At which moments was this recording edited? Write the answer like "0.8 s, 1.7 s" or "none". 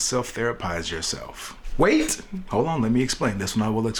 none